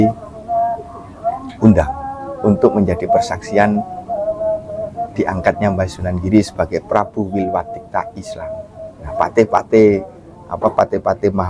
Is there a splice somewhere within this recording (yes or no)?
yes